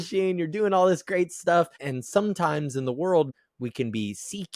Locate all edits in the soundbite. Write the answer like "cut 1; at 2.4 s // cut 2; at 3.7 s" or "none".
cut 1; at 1.8 s // cut 2; at 3.3 s